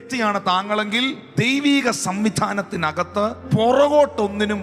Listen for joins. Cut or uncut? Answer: cut